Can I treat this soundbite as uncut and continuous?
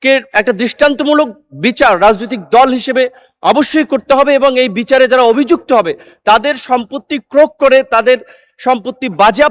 yes; 0 cuts

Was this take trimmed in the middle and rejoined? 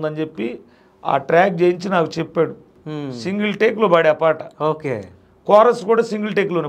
yes; 1 cut; at 2.7 s

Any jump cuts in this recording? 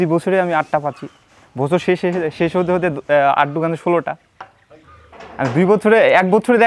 no; 0 cuts

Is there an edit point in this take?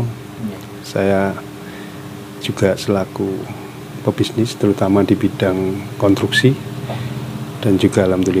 no; 0 cuts

